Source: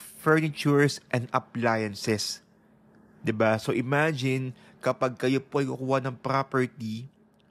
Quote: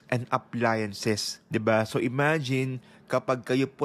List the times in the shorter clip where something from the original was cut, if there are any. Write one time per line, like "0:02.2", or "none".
0:01.3